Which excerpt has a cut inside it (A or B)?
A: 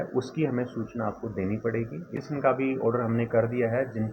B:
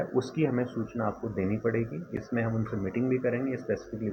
A